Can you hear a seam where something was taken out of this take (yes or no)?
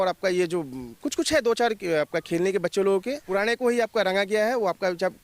yes